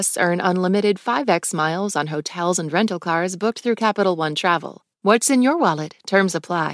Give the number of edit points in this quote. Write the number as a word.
one